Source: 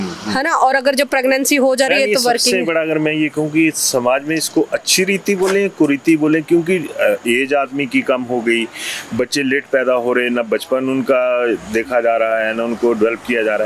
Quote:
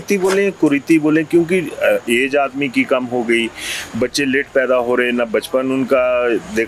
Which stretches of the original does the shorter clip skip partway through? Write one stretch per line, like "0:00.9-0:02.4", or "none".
none

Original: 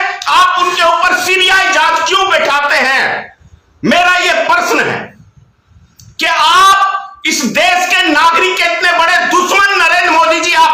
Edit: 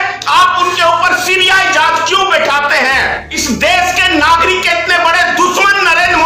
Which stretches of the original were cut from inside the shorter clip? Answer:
0:03.3-0:07.2

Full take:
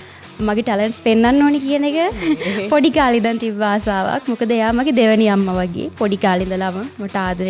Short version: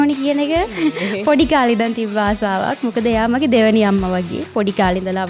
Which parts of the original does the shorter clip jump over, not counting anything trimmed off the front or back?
none

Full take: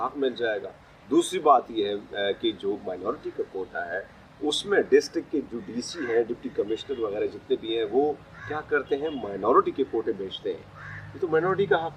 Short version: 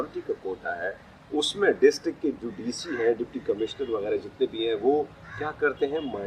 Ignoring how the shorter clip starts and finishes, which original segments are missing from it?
none

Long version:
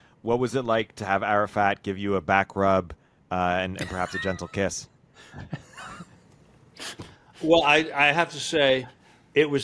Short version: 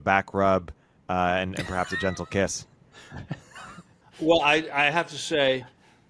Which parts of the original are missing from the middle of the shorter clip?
0:06.2-0:07.2

